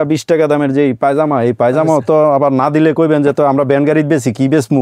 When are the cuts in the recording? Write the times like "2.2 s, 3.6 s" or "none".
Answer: none